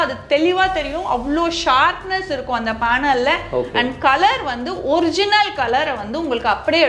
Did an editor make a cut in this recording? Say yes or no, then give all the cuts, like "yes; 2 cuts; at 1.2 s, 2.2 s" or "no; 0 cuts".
no; 0 cuts